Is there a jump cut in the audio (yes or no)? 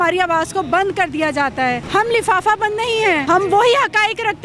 yes